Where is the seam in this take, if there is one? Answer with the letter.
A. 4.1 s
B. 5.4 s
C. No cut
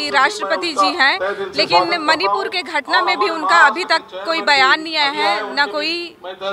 C